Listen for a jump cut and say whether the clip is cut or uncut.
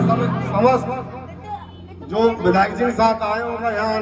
uncut